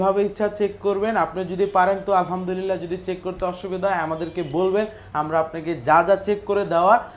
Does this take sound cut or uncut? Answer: uncut